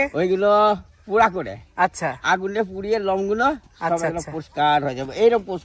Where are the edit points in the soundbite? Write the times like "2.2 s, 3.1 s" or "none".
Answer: none